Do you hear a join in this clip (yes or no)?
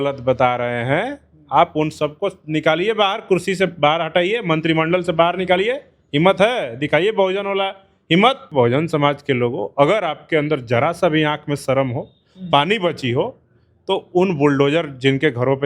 yes